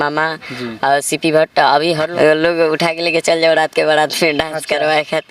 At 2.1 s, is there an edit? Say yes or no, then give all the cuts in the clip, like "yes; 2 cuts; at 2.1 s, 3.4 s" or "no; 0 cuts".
yes; 1 cut; at 2.1 s